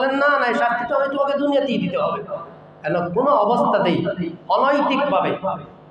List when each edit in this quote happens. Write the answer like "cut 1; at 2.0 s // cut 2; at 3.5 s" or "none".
none